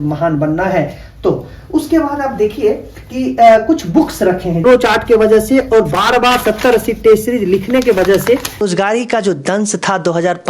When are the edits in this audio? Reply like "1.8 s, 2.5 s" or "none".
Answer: 4.6 s, 8.6 s